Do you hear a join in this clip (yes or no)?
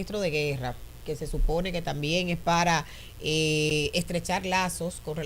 no